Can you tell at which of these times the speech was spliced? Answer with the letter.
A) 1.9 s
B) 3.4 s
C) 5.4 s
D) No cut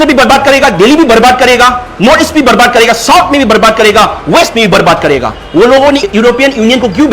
C